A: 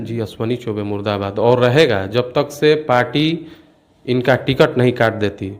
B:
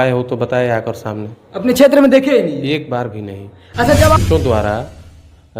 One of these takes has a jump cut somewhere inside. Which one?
B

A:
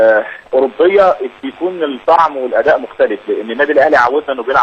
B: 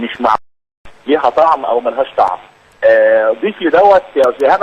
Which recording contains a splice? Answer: A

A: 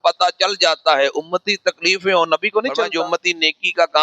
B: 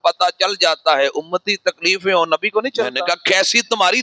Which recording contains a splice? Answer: A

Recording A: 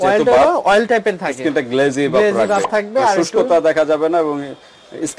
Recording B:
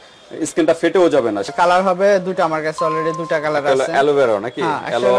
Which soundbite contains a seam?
B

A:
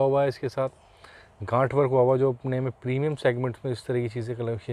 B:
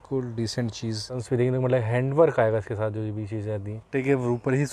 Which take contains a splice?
B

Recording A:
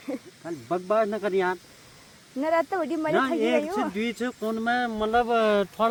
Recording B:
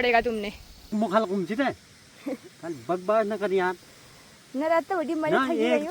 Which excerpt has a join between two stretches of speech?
B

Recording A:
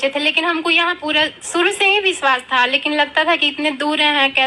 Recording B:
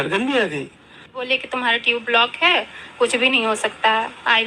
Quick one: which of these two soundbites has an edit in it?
B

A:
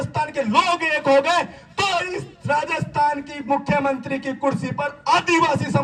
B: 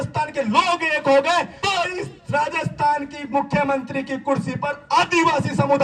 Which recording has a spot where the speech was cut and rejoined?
B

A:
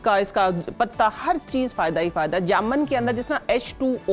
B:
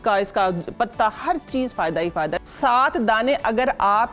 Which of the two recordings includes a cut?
B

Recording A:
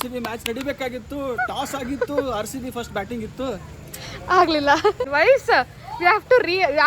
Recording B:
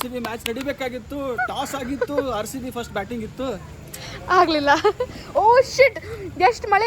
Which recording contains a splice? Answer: A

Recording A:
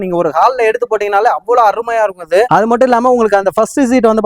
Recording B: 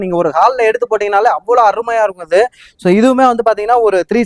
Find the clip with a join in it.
A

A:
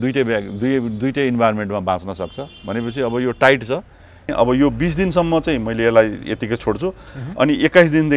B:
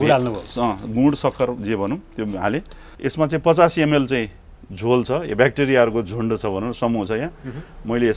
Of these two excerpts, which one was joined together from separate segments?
A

